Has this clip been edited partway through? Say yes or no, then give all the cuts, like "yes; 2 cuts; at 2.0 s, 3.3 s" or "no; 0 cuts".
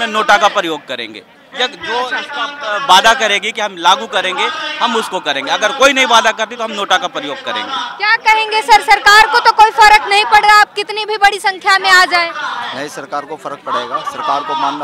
no; 0 cuts